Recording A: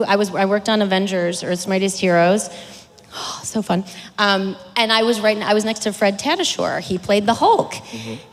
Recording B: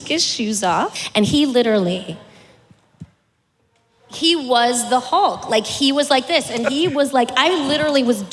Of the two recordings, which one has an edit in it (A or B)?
B